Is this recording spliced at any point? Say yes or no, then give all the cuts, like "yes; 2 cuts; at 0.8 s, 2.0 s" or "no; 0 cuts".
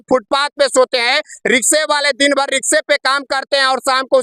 no; 0 cuts